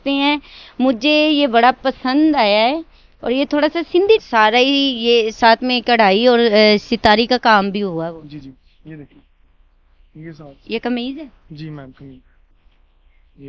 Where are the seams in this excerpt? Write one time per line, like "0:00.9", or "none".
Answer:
0:04.2

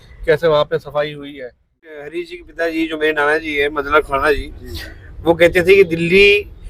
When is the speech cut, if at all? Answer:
0:02.0

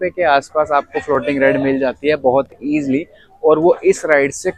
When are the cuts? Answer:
none

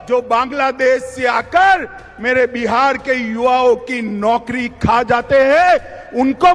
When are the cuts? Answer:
none

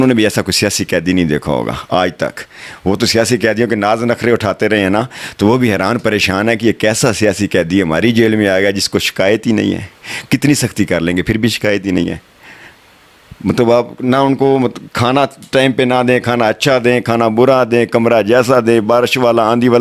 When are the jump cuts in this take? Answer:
none

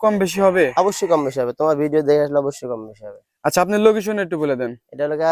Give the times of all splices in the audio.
none

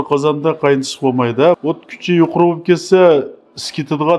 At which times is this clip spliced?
0:01.6

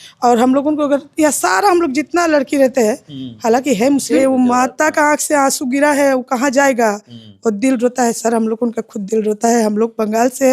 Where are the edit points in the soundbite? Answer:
0:04.2

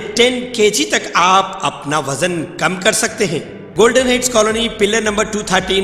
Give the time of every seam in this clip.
0:03.6

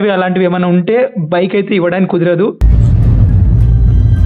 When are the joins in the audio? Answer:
none

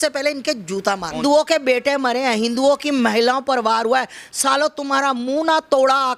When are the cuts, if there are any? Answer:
0:01.2

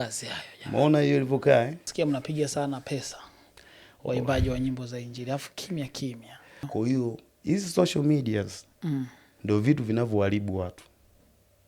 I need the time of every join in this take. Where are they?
0:01.8
0:06.7

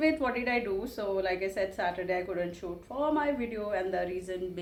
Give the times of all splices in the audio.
none

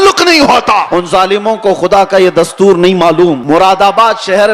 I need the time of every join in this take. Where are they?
0:00.9
0:03.4

